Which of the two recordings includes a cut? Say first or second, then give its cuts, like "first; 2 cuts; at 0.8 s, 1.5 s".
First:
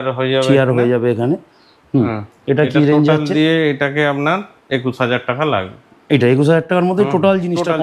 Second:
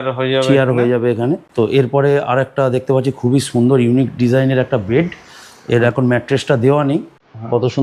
second; 1 cut; at 1.5 s